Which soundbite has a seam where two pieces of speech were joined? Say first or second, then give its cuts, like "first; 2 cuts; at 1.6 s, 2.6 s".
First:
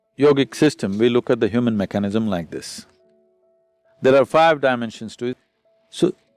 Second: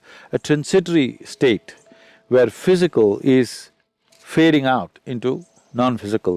first; 1 cut; at 5.2 s